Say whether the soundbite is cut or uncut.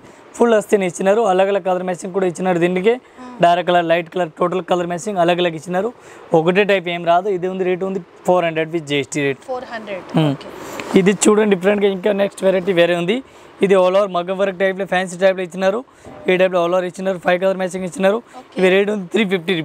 uncut